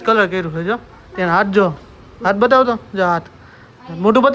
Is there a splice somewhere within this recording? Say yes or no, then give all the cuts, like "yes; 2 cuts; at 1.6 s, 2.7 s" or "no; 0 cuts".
no; 0 cuts